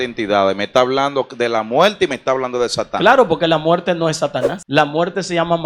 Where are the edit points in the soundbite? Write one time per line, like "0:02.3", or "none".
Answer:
0:04.6

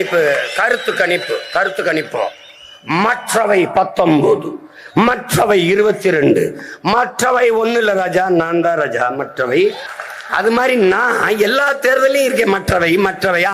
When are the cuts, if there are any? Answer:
0:09.9

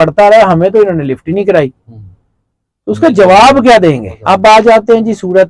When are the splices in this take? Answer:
0:04.1

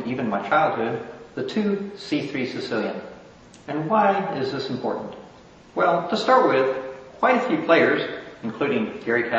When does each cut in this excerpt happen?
0:01.5

